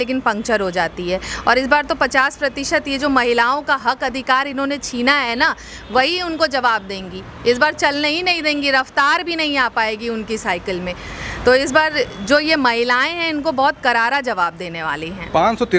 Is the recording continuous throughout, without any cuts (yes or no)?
yes